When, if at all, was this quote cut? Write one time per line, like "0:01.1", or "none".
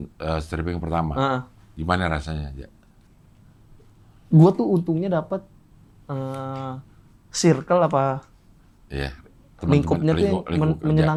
none